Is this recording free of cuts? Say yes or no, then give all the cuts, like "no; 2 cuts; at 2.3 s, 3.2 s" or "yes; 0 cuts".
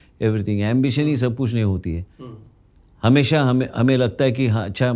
yes; 0 cuts